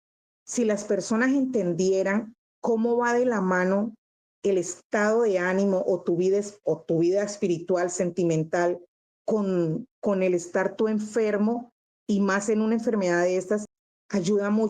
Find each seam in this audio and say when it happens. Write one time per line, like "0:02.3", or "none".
0:13.7